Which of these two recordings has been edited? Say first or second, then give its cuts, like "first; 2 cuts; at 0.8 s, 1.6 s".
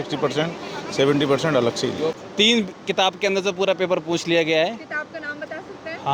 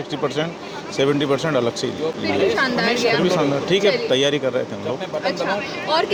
first; 1 cut; at 2.2 s